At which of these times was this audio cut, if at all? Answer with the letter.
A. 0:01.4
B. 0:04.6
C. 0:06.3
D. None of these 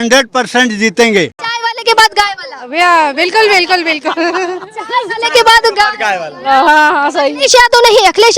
A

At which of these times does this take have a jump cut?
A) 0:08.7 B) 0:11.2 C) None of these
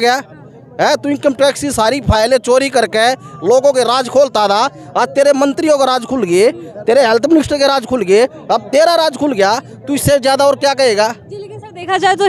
C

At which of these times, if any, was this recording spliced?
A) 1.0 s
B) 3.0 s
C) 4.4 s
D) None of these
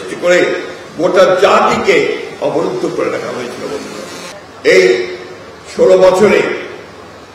C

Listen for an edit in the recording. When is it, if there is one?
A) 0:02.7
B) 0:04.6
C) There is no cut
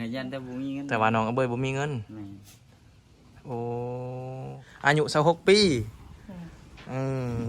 B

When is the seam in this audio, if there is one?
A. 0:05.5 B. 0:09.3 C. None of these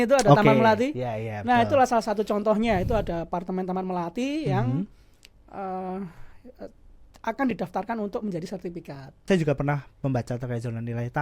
B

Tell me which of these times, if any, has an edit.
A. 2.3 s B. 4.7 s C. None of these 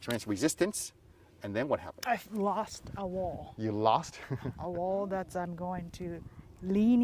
C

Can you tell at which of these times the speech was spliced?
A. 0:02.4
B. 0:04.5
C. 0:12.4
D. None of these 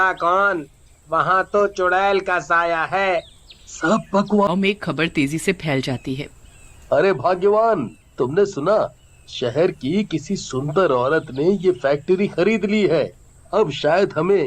B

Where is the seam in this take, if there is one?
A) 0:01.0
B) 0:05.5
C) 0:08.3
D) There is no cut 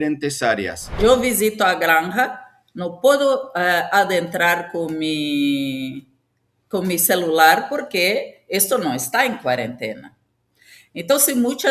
A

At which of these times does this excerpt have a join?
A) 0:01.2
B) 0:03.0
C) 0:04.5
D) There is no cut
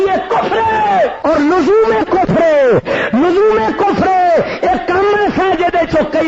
A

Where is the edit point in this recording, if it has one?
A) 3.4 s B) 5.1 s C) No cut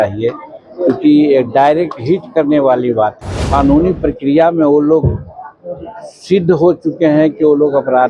A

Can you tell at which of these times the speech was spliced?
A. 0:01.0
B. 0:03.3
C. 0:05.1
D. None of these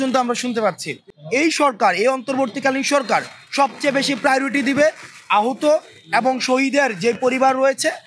A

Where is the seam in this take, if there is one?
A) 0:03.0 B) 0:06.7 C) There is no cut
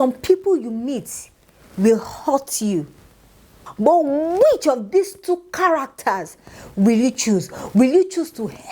C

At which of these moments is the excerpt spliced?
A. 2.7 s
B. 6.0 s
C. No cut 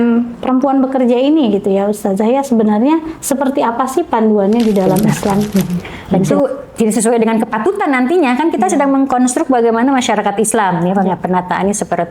B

